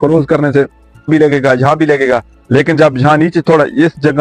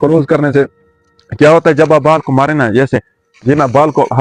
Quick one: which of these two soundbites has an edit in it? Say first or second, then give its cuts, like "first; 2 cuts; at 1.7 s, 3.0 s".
first; 1 cut; at 1.1 s